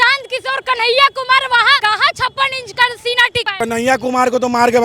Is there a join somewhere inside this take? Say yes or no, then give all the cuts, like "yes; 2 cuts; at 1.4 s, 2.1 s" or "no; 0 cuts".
yes; 2 cuts; at 1.8 s, 3.5 s